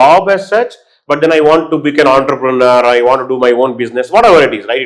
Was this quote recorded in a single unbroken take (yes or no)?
yes